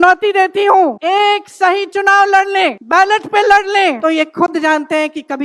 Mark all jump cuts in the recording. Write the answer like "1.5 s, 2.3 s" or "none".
1.0 s, 2.8 s, 4.0 s